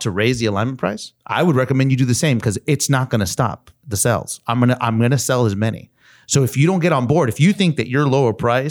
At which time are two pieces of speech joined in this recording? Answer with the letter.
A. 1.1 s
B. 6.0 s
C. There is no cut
A